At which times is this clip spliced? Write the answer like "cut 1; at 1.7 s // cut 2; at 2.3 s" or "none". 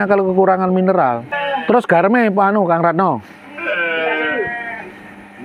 cut 1; at 1.3 s